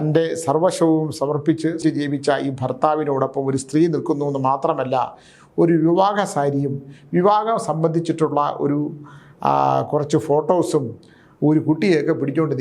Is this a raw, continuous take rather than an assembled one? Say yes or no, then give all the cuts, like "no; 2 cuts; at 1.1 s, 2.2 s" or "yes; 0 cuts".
no; 1 cut; at 1.8 s